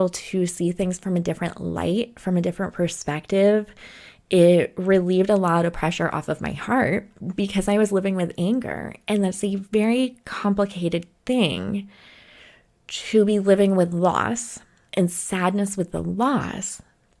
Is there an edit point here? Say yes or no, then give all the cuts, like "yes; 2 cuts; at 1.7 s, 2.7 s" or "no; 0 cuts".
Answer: no; 0 cuts